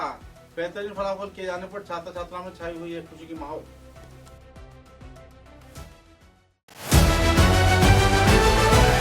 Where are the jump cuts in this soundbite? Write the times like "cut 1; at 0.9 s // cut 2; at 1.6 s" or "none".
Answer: cut 1; at 6.6 s